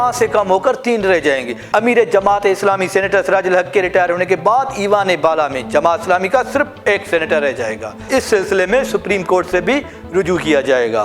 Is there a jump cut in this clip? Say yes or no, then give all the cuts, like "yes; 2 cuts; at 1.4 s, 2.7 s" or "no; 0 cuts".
yes; 2 cuts; at 1.6 s, 8.1 s